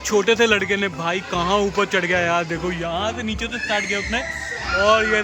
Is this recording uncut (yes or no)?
yes